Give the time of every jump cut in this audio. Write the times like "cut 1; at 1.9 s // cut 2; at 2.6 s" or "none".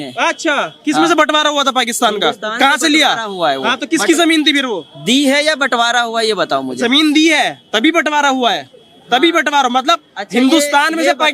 none